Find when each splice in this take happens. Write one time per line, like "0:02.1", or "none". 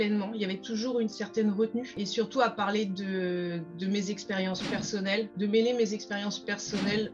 0:02.0
0:05.3